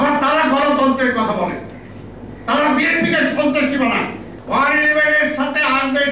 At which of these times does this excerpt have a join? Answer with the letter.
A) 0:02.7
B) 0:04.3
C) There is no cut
B